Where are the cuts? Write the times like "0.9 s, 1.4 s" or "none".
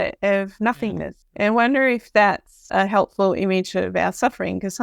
1.2 s, 2.6 s